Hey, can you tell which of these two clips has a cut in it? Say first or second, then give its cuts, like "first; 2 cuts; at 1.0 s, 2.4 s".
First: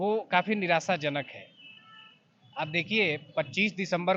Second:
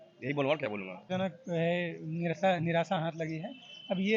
second; 1 cut; at 1.1 s